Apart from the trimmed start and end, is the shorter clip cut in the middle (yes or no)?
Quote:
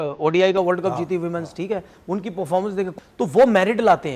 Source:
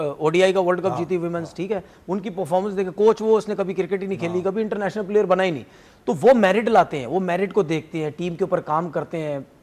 yes